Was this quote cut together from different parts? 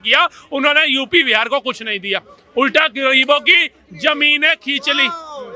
no; 0 cuts

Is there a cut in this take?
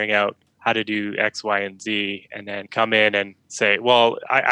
yes; 2 cuts; at 2.7 s, 3.4 s

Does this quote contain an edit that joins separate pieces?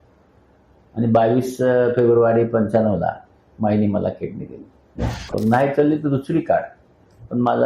yes; 1 cut; at 5.3 s

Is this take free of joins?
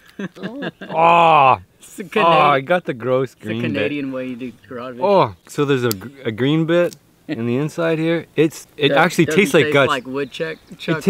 no; 2 cuts; at 5.5 s, 8.7 s

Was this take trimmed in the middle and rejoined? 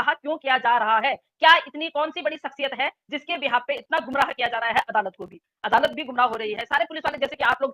no; 0 cuts

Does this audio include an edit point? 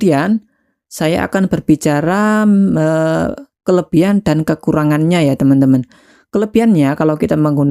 no; 0 cuts

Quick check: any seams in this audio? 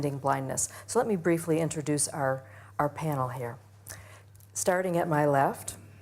yes; 1 cut; at 2.0 s

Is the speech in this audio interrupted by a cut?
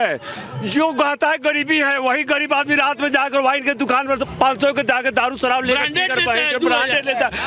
no; 0 cuts

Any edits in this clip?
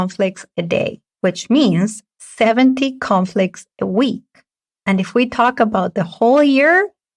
yes; 1 cut; at 1.0 s

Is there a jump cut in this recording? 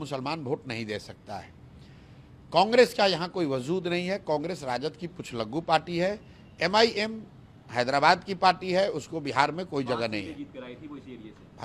no; 0 cuts

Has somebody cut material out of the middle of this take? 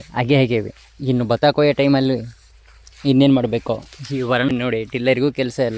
yes; 1 cut; at 4.5 s

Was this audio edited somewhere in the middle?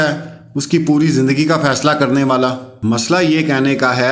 yes; 1 cut; at 2.7 s

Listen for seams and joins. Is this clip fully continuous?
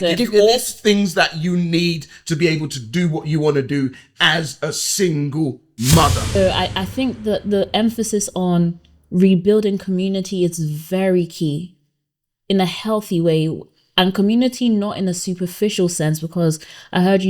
no; 1 cut; at 6.4 s

